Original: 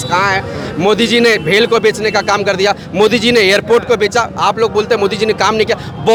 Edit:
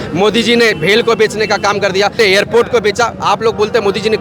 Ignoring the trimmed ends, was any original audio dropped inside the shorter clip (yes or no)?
yes